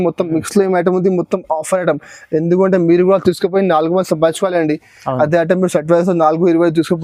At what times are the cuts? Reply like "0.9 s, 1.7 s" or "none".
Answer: none

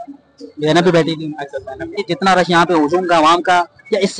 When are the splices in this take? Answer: 2.0 s

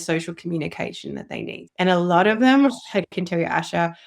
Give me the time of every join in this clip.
1.6 s

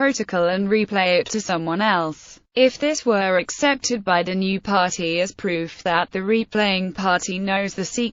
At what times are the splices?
1.0 s

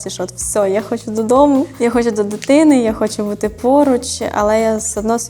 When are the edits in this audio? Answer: 1.7 s

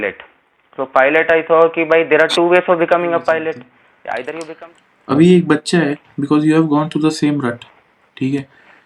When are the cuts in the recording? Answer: 4.5 s

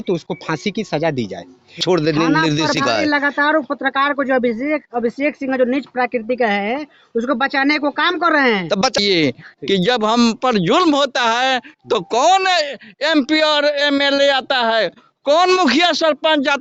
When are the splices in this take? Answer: 1.8 s, 9.0 s

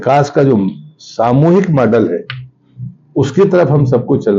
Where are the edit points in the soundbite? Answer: none

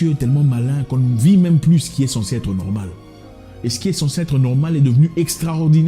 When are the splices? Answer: none

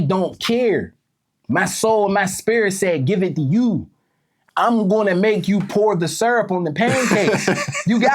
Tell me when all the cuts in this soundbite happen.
4.4 s

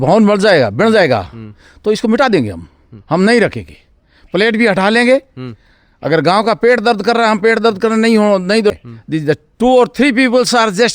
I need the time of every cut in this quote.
8.7 s

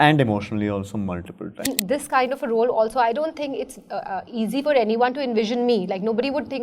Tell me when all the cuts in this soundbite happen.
1.6 s

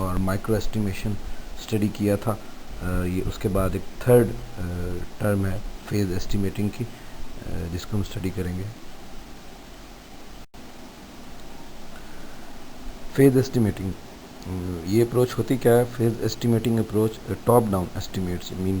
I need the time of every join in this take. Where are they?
10.5 s

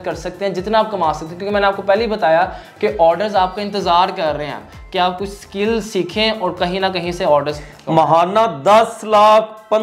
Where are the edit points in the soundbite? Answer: none

